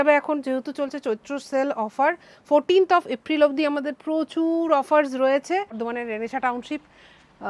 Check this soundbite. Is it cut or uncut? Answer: cut